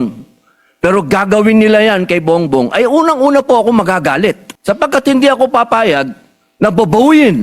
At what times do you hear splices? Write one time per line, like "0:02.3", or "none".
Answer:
0:04.5